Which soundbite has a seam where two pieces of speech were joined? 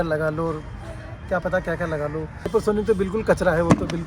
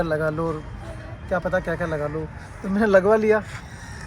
first; 1 cut; at 2.4 s

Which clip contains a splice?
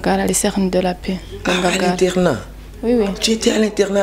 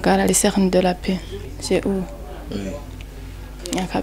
second; 1 cut; at 1.3 s

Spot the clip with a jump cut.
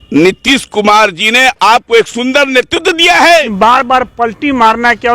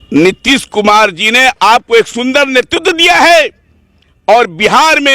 first; 1 cut; at 3.5 s

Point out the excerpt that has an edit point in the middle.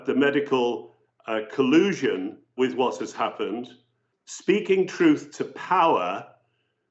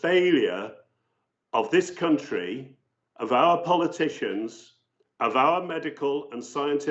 first; 1 cut; at 2.5 s

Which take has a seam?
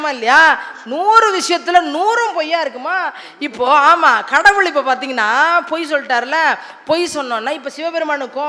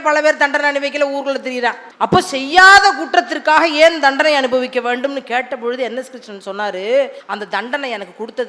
second; 2 cuts; at 1.9 s, 7.2 s

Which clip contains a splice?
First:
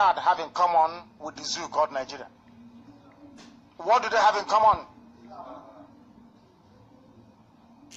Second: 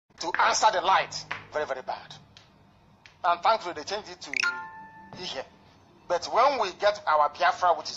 second; 1 cut; at 6.5 s

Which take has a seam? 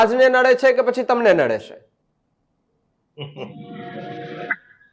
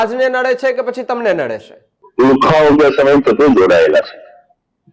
second; 1 cut; at 2.0 s

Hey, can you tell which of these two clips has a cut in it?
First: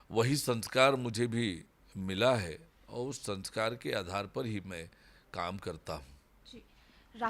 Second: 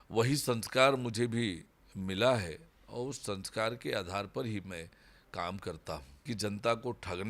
second; 1 cut; at 6.2 s

